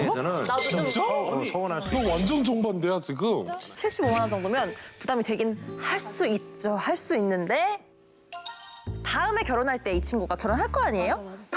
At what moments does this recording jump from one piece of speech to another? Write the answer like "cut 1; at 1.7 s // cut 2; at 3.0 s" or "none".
cut 1; at 3.8 s